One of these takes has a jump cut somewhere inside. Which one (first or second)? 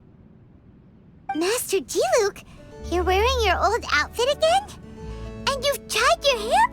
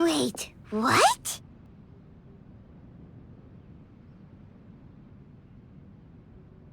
second